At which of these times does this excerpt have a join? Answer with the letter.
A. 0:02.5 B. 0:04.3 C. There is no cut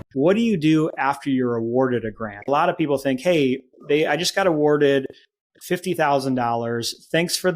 A